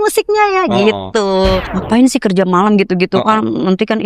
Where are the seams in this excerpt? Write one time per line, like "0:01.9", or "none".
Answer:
0:01.6